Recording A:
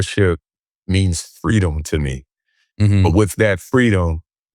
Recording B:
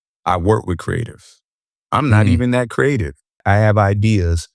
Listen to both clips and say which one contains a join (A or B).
B